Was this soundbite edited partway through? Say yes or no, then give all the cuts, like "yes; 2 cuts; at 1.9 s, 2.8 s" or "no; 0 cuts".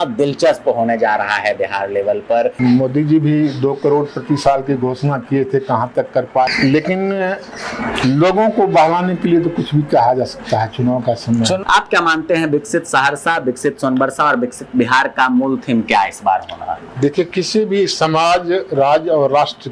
yes; 3 cuts; at 2.6 s, 6.5 s, 11.6 s